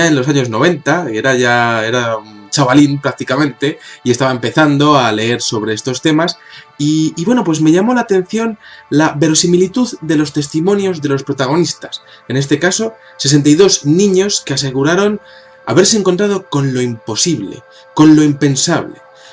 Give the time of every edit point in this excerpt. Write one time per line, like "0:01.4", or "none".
0:08.4